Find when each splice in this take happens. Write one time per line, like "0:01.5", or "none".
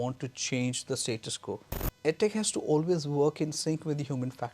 0:01.8